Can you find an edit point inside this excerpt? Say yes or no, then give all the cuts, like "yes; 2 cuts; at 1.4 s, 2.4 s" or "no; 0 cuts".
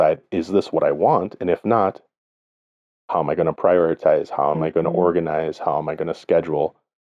no; 0 cuts